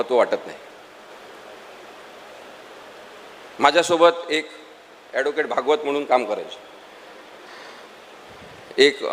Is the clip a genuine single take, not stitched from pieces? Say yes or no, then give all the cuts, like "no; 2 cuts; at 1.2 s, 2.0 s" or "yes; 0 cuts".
no; 1 cut; at 1.1 s